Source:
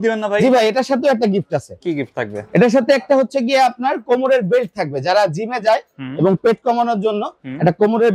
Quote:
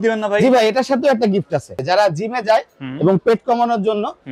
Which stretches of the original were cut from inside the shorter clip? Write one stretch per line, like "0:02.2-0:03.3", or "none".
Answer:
0:01.7-0:04.9